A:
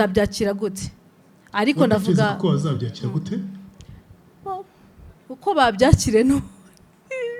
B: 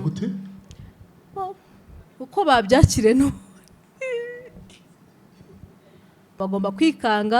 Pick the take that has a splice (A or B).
B